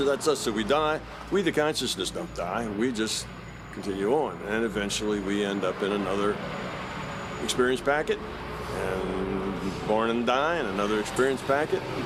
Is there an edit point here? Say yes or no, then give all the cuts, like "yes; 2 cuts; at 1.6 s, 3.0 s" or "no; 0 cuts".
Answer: no; 0 cuts